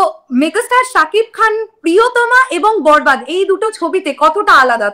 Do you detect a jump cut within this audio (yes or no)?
no